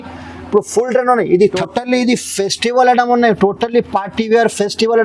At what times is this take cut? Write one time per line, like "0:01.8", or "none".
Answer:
0:01.5